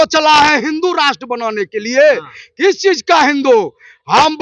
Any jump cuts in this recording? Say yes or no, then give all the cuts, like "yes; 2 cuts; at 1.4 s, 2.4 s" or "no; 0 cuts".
no; 0 cuts